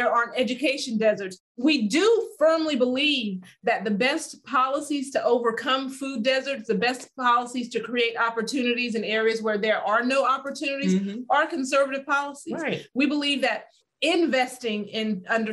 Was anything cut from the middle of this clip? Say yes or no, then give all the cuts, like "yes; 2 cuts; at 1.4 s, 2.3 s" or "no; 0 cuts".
no; 0 cuts